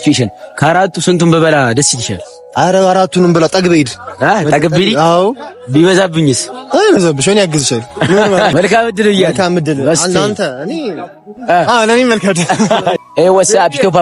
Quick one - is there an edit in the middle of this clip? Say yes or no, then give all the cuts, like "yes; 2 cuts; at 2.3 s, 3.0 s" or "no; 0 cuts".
yes; 1 cut; at 8.5 s